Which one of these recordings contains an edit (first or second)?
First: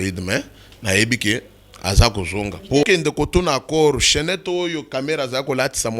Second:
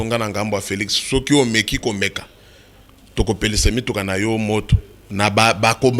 first